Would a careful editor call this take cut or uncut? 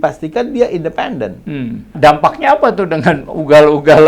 cut